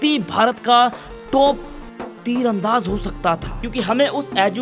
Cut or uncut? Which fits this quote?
cut